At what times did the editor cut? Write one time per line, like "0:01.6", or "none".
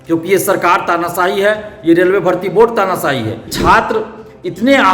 0:03.5